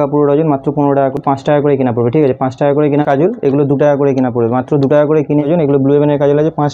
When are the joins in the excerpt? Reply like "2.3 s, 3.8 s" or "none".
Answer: 1.1 s, 3.0 s, 5.5 s